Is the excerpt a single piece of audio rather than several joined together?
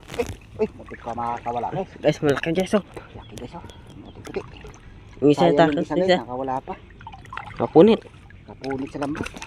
yes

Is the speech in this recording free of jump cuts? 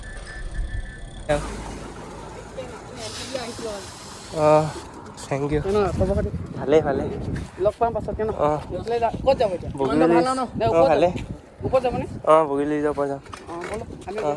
no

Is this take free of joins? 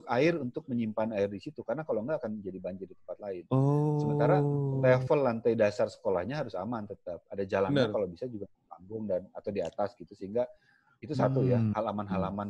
yes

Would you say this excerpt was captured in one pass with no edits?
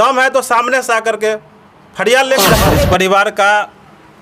no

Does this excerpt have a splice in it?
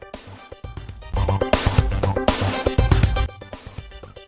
yes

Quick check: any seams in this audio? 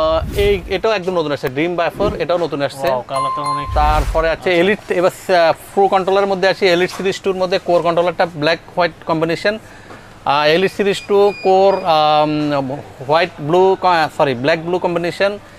no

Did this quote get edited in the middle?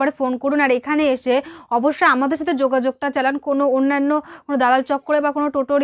no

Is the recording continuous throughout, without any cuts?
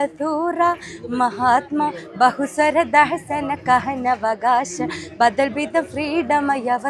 yes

